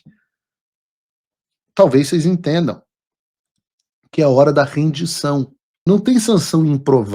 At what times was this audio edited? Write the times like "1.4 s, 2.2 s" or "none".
5.6 s